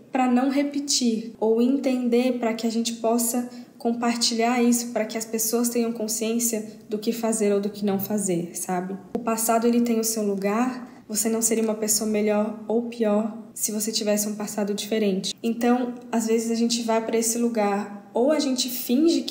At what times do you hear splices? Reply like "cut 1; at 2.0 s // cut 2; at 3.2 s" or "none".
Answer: none